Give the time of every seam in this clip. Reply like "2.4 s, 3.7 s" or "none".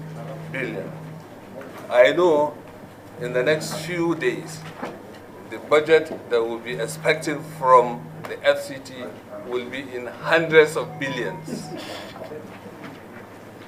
none